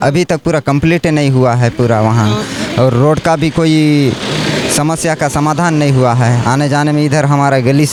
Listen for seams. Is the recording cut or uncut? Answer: uncut